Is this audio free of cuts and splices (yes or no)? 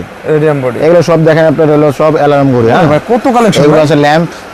yes